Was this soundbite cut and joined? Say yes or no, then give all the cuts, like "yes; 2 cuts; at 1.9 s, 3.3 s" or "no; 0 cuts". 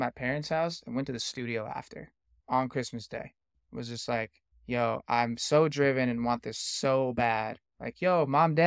yes; 3 cuts; at 2.4 s, 3.5 s, 4.5 s